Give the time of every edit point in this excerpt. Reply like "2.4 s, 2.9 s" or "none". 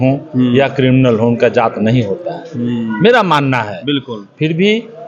none